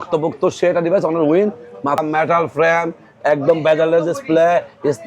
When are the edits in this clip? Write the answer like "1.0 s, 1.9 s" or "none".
2.0 s